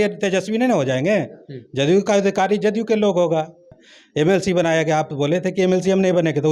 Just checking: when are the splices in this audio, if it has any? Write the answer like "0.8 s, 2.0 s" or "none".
3.8 s